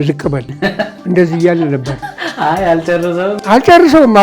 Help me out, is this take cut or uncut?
uncut